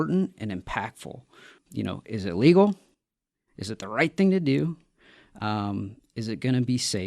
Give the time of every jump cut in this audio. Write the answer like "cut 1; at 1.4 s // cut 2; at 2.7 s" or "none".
cut 1; at 1.6 s